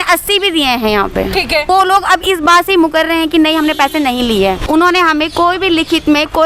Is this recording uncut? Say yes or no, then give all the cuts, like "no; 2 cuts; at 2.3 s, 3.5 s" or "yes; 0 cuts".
no; 2 cuts; at 1.7 s, 4.6 s